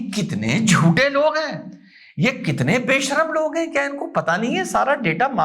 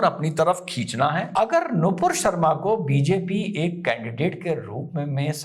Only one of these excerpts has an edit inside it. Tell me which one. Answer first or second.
second